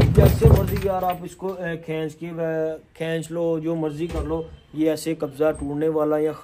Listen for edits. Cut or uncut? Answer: uncut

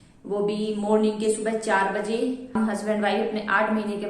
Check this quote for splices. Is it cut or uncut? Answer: cut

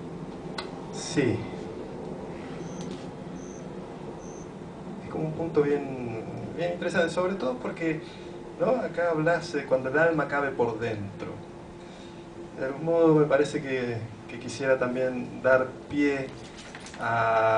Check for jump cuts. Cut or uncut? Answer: cut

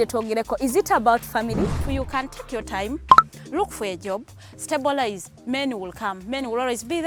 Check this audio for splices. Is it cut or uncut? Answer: uncut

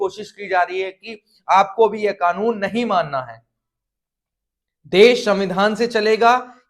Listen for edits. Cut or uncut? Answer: uncut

